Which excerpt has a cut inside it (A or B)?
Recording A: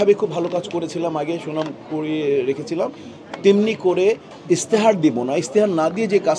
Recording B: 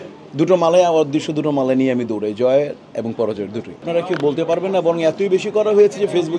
B